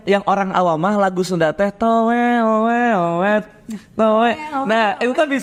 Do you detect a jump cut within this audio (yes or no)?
no